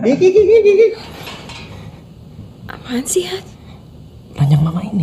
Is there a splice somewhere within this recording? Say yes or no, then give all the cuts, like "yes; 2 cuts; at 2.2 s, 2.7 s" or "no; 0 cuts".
yes; 1 cut; at 1.0 s